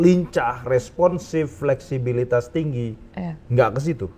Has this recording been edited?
no; 0 cuts

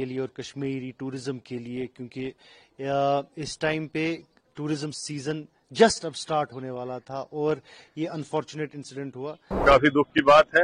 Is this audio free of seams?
no; 1 cut; at 9.6 s

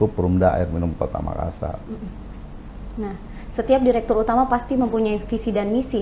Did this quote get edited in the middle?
no; 0 cuts

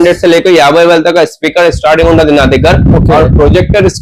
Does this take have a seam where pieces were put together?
no; 0 cuts

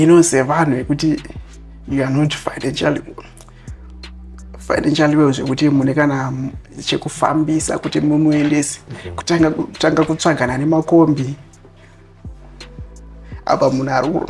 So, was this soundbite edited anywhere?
yes; 2 cuts; at 11.6 s, 13.4 s

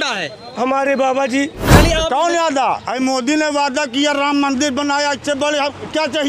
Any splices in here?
yes; 1 cut; at 1.6 s

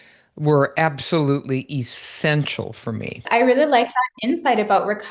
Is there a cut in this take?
no; 0 cuts

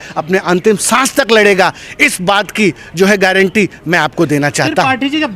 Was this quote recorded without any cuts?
yes; 0 cuts

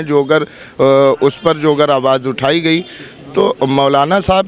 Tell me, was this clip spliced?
no; 0 cuts

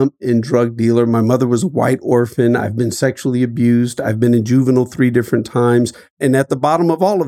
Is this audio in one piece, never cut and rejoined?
no; 1 cut; at 6.0 s

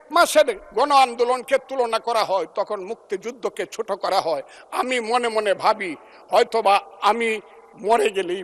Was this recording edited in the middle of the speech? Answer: no; 0 cuts

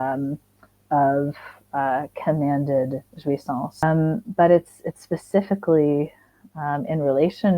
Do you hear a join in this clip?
yes; 1 cut; at 3.8 s

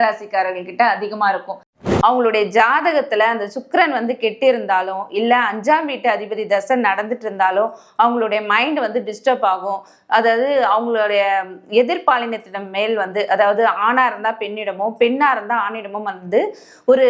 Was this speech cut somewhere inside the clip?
yes; 1 cut; at 1.8 s

